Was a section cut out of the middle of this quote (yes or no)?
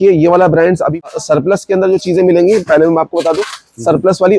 yes